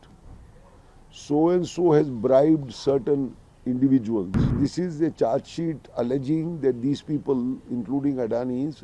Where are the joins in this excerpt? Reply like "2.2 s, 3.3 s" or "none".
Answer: 4.5 s